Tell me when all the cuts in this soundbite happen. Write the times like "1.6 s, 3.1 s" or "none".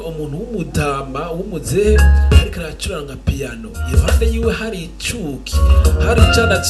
none